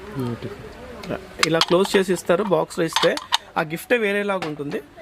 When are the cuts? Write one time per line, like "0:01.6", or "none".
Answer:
none